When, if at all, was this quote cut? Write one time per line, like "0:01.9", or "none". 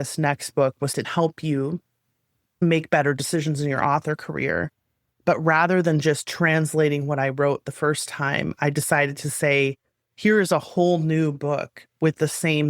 0:01.1
0:02.6